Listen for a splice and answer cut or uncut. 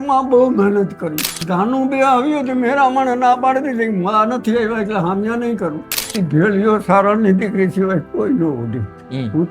cut